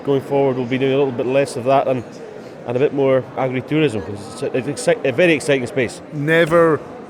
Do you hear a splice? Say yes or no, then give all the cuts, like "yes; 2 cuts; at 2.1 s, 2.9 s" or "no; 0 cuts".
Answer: yes; 2 cuts; at 3.4 s, 6.1 s